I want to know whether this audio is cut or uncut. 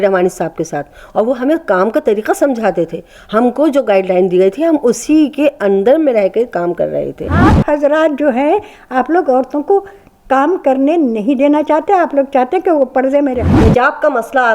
cut